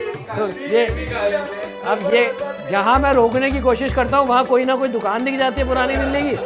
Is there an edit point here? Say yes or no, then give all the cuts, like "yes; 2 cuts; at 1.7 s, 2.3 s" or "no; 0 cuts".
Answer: no; 0 cuts